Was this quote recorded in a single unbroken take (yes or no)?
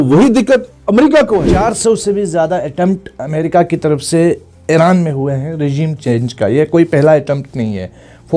no